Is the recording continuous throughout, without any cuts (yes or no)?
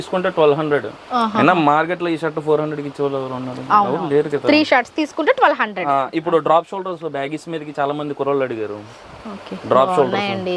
yes